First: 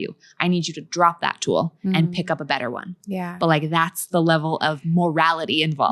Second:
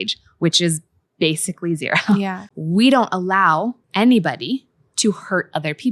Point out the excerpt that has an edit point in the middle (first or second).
second